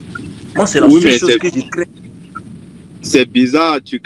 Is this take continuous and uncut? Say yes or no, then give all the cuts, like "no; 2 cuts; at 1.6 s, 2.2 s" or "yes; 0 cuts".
yes; 0 cuts